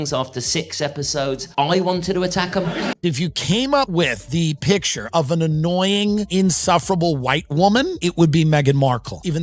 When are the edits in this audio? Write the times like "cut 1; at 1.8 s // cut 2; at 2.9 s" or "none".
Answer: cut 1; at 2.9 s